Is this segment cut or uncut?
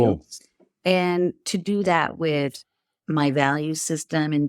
uncut